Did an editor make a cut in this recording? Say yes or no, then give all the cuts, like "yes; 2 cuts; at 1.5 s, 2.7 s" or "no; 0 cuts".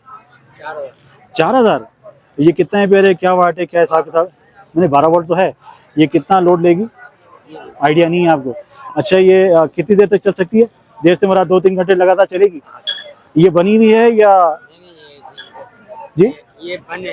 no; 0 cuts